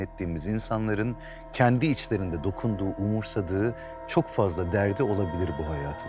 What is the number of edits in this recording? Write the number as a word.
zero